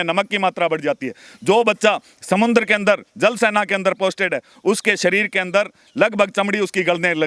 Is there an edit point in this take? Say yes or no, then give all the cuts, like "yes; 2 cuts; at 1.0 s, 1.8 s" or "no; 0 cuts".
no; 0 cuts